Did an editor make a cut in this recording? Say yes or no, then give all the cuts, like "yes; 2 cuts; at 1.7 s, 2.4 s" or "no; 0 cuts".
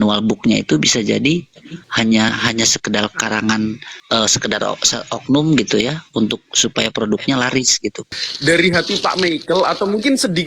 yes; 1 cut; at 8.1 s